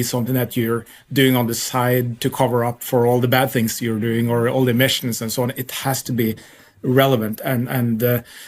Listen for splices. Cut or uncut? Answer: uncut